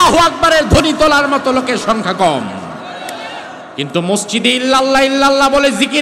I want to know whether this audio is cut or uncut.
cut